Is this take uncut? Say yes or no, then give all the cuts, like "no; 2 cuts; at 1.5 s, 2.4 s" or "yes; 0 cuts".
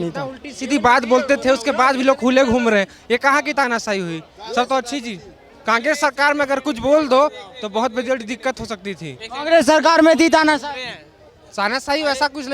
yes; 0 cuts